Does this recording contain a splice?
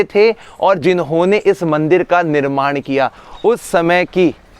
yes; 1 cut; at 3.2 s

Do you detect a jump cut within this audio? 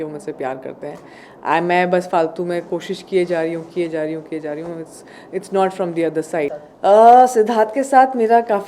yes; 1 cut; at 6.6 s

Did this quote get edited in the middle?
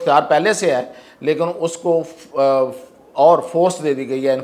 no; 0 cuts

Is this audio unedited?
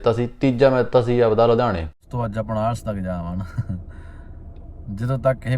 no; 1 cut; at 2.1 s

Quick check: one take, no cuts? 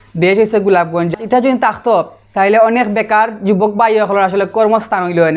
no; 1 cut; at 1.2 s

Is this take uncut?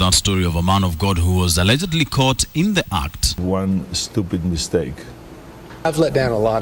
no; 2 cuts; at 3.2 s, 5.7 s

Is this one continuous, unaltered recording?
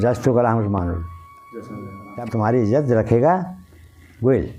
no; 1 cut; at 2.1 s

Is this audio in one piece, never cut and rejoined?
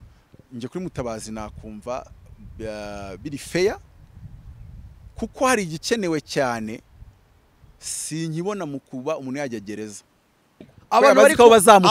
no; 1 cut; at 10.7 s

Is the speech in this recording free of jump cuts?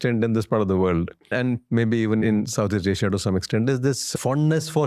no; 3 cuts; at 1.3 s, 2.2 s, 4.1 s

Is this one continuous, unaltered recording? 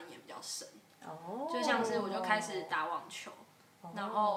yes; 0 cuts

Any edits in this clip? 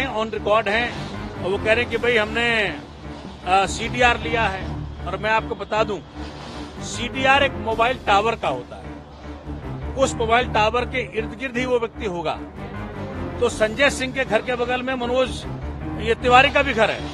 no; 0 cuts

